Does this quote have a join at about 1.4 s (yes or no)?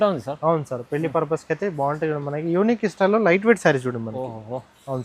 no